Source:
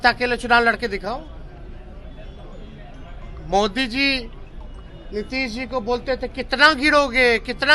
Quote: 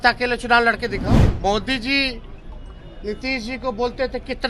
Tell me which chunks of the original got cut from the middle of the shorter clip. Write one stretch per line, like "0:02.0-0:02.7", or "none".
0:01.2-0:03.3